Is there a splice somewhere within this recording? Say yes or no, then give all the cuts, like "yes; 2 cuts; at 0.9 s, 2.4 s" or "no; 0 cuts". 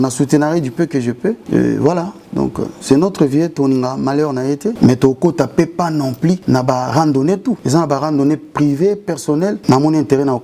yes; 5 cuts; at 1.4 s, 4.8 s, 6.4 s, 7.6 s, 9.6 s